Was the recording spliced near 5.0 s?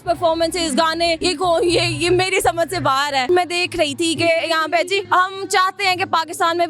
yes; 3 cuts; at 1.2 s, 3.2 s, 5.0 s

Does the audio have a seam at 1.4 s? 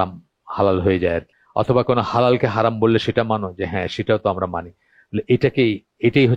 yes; 1 cut; at 1.4 s

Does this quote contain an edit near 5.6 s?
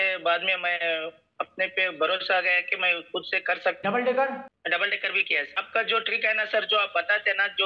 yes; 3 cuts; at 3.8 s, 4.5 s, 5.6 s

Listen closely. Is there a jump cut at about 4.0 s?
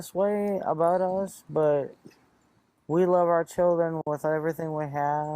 yes; 1 cut; at 4.0 s

